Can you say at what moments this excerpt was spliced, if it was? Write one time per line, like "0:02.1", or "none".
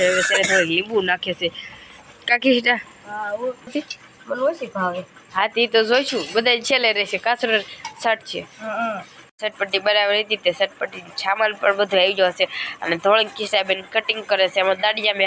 0:03.7
0:09.3